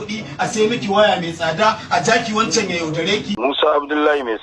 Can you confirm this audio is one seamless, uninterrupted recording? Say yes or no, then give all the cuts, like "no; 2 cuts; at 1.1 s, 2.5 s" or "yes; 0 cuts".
no; 1 cut; at 3.4 s